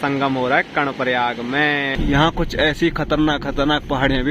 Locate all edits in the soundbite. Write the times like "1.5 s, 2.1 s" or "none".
1.9 s